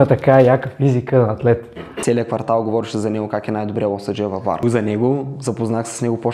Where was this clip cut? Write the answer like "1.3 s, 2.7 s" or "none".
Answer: 1.9 s, 4.6 s